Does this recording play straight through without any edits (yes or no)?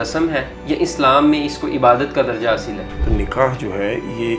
no